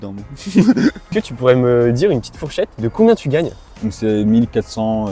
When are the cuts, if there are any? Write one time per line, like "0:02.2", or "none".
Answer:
0:01.1
0:03.6